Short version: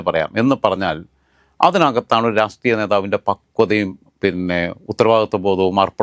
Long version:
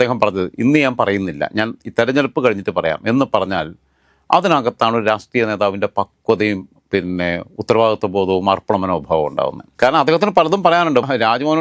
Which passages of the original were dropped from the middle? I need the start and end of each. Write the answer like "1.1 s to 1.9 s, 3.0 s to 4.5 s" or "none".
none

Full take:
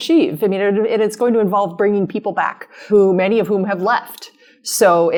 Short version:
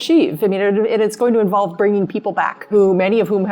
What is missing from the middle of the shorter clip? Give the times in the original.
2.6 s to 2.8 s

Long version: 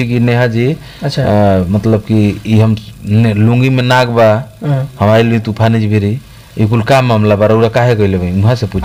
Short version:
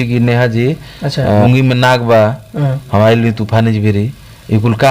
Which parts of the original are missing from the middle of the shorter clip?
1.4 s to 3.5 s

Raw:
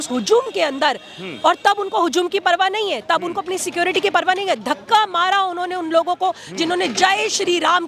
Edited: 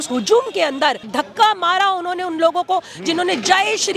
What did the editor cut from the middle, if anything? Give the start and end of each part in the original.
1.1 s to 4.6 s

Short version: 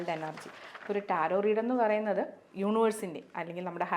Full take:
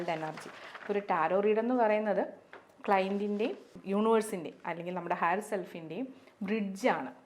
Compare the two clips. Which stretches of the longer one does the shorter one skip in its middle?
2.4 s to 3.7 s

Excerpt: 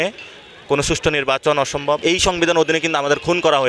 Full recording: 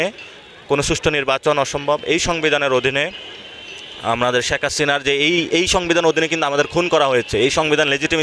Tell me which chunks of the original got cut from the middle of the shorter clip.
2.0 s to 5.5 s

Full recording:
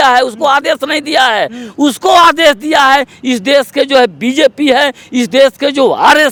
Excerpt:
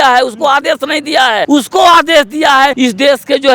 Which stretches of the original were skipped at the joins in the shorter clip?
1.4 s to 1.7 s, 3.0 s to 3.2 s

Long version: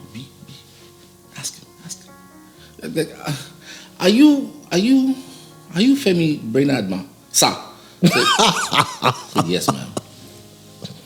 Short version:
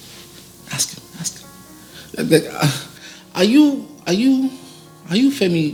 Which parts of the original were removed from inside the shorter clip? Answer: none

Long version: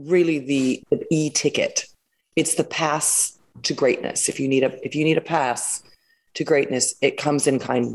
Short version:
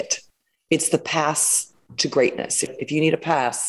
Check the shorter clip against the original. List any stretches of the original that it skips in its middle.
4.4 s to 4.7 s

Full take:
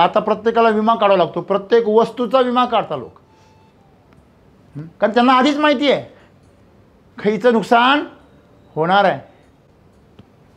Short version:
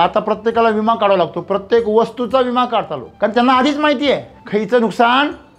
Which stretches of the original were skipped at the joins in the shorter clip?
3.0 s to 4.8 s, 6.1 s to 7.1 s

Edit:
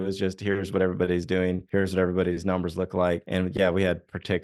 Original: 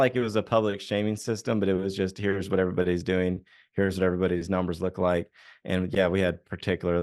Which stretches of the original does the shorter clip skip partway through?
3.4 s to 3.7 s, 5.3 s to 5.6 s

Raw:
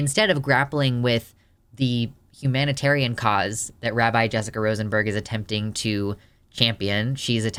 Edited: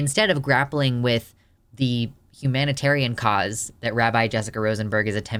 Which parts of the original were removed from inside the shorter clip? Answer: none

